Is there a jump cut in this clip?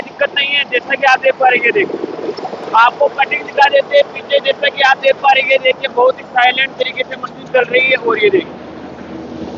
no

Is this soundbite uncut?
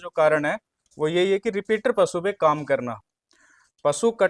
yes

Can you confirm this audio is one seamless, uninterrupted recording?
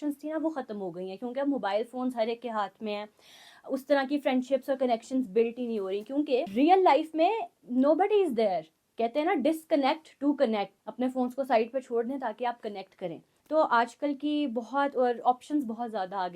no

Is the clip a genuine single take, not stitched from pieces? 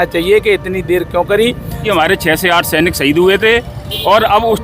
no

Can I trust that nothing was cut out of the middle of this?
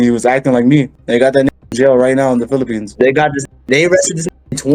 no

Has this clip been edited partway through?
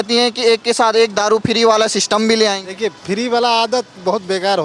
no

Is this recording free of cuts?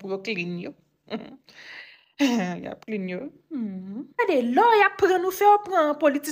no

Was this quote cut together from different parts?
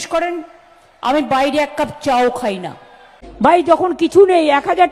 yes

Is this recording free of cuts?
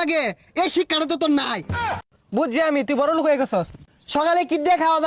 no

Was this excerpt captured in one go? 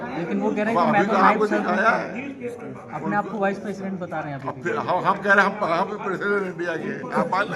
yes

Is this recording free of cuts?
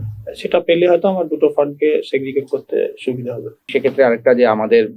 yes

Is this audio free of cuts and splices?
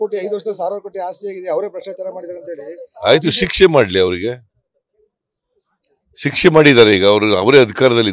yes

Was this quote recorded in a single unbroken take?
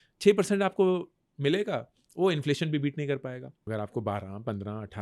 no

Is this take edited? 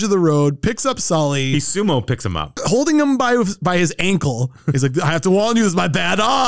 no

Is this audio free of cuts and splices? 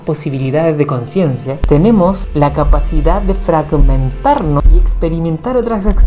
no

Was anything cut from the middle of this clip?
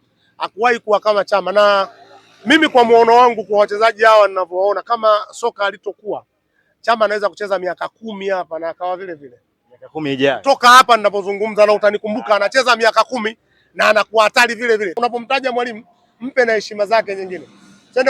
yes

